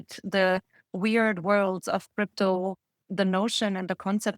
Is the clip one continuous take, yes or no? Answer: no